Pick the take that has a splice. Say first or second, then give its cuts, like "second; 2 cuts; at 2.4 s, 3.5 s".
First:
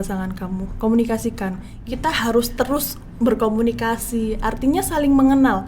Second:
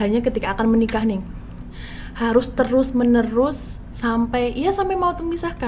first; 1 cut; at 1.7 s